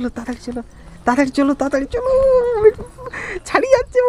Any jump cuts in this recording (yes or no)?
no